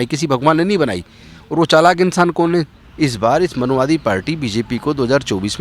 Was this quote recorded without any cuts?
no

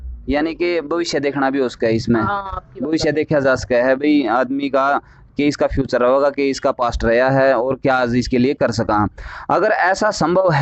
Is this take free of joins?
yes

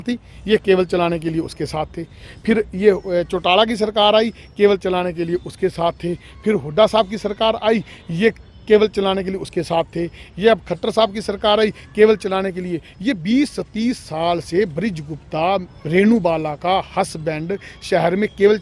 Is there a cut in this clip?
no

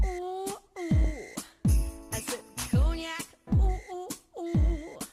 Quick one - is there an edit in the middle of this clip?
no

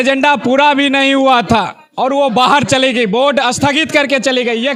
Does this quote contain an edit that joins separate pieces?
no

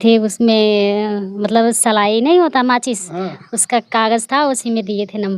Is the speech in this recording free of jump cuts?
yes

